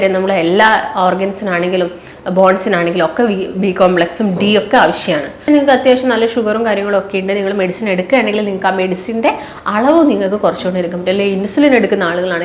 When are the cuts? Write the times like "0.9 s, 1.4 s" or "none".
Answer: 5.3 s